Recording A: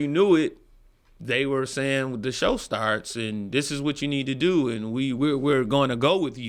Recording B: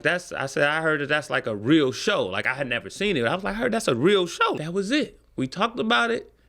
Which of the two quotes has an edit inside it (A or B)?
B